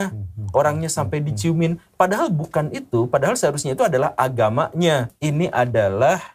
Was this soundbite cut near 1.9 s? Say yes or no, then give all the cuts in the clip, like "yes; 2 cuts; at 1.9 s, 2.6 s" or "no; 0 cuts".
no; 1 cut; at 5.2 s